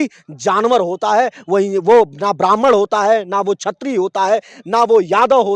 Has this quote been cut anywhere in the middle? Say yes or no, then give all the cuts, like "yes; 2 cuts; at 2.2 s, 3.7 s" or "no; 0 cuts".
no; 0 cuts